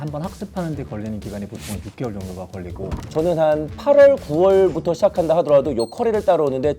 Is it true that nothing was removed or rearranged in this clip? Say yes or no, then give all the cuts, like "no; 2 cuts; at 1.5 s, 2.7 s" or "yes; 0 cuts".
no; 1 cut; at 3.0 s